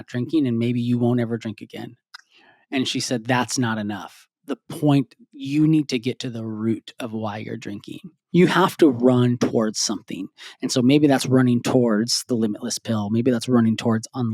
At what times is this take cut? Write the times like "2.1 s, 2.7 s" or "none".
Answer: 8.1 s